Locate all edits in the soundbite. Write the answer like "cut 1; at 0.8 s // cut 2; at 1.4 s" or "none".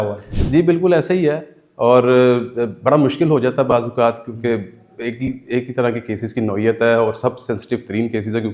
none

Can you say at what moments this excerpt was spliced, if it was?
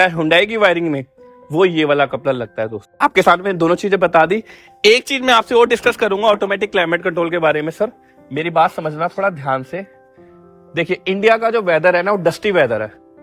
none

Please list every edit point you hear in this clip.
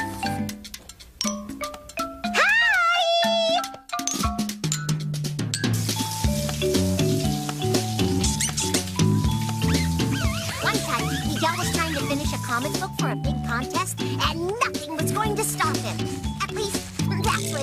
cut 1; at 9.2 s

